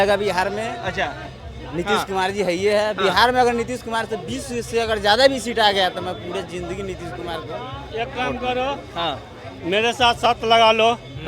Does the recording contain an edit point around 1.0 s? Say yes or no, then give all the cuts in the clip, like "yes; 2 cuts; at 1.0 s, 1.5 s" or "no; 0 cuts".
yes; 1 cut; at 1.0 s